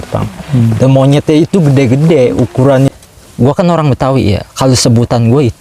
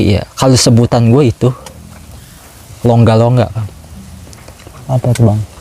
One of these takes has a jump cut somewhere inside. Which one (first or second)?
first